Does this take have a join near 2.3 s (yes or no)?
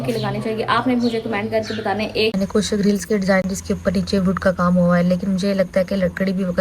yes